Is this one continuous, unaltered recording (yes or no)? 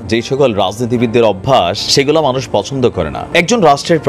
no